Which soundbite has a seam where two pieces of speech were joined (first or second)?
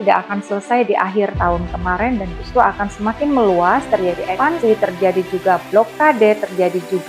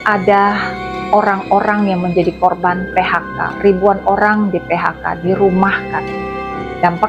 first